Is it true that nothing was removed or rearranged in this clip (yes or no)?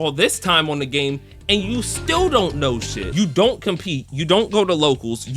no